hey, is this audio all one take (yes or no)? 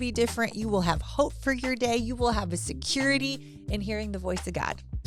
yes